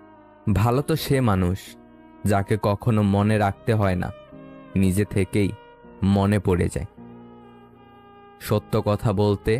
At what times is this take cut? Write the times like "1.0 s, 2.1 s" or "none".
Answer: 7.0 s, 8.5 s

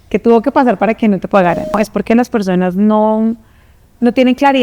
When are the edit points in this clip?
1.8 s

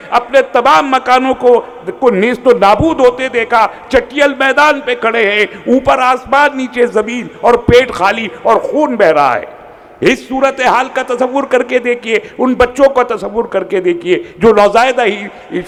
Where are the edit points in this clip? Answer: none

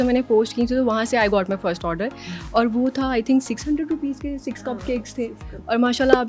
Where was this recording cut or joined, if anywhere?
none

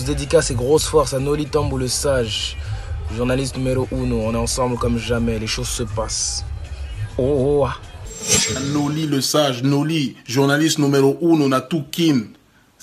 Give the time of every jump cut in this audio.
none

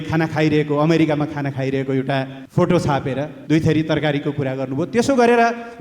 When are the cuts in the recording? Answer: 2.4 s, 3.3 s

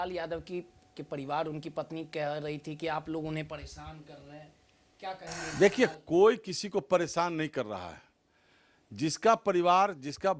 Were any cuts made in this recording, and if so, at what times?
none

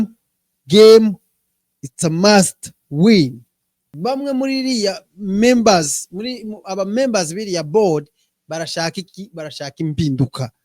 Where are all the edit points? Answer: 3.9 s

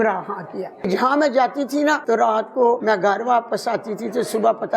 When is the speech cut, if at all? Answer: 0.9 s, 2.0 s, 2.8 s

